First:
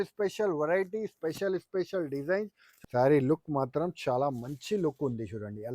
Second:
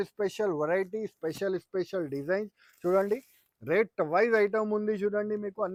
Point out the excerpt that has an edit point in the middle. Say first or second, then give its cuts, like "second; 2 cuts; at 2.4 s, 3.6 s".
first; 1 cut; at 2.6 s